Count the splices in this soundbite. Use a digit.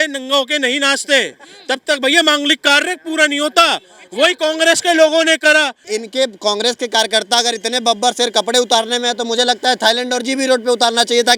1